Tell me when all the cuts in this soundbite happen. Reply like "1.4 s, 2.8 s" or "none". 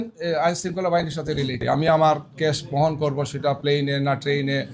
1.6 s

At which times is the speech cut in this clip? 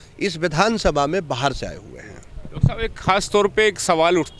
none

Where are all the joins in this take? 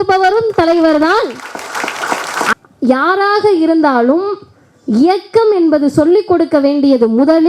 2.4 s

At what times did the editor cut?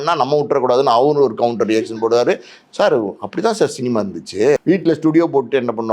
4.6 s

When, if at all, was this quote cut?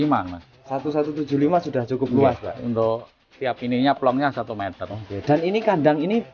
none

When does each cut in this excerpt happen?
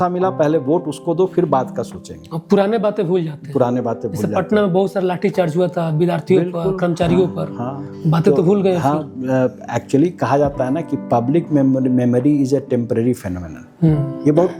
none

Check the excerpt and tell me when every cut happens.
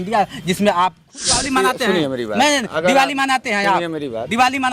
1.4 s

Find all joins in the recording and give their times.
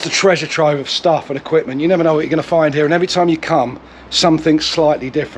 none

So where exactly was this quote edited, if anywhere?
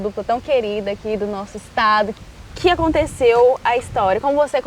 2.2 s

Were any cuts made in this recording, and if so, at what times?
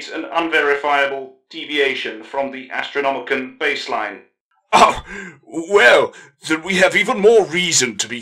none

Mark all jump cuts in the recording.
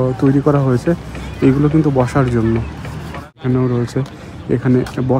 3.4 s

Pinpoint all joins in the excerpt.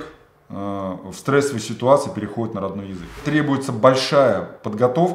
3.2 s

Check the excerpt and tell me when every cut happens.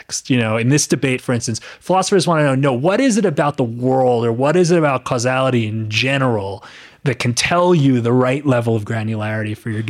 none

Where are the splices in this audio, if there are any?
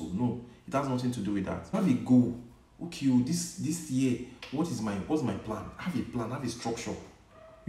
1.8 s

